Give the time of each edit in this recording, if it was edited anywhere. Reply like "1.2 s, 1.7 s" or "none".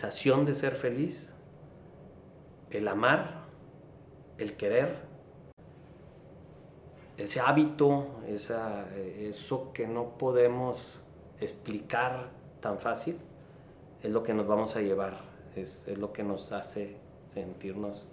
none